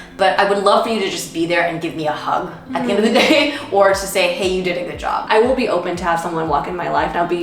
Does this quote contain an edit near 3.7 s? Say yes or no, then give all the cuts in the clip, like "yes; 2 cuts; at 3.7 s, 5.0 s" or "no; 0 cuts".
no; 1 cut; at 5.2 s